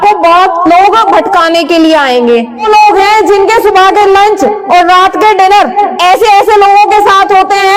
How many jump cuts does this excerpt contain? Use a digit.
1